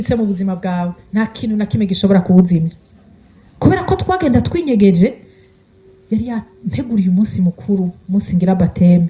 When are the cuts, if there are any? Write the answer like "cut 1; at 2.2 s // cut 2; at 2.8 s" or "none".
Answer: none